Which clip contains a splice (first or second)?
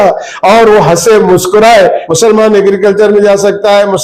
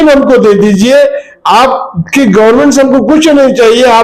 first